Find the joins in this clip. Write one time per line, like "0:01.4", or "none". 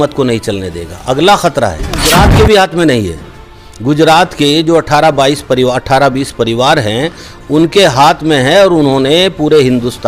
0:02.1